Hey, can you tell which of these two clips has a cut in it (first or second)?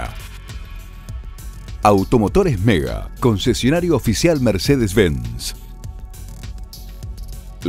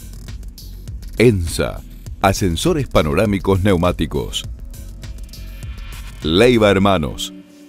second